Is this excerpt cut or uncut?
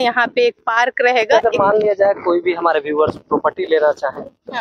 cut